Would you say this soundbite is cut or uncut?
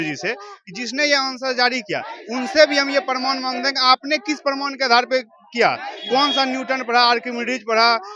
uncut